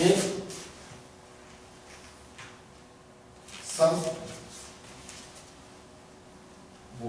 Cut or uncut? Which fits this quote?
uncut